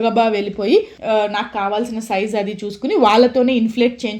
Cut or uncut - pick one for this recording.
cut